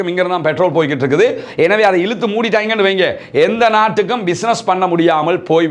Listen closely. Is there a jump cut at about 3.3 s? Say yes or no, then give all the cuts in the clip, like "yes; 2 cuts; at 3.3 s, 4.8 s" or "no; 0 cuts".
no; 0 cuts